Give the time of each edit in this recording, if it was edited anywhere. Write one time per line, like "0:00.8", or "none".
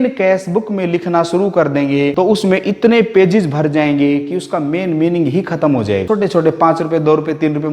0:02.1
0:06.0